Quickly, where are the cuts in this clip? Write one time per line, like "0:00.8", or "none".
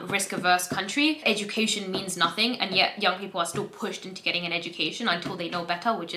0:01.2